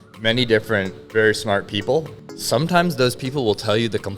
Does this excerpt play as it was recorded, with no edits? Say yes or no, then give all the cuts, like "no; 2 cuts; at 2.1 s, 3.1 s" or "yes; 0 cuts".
no; 2 cuts; at 1.0 s, 2.2 s